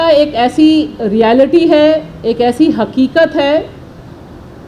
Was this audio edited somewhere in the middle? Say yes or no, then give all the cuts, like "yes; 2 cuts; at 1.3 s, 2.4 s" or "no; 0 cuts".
no; 0 cuts